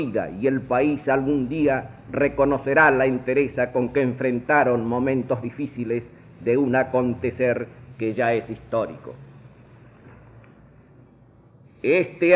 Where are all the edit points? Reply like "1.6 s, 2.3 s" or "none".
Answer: 4.7 s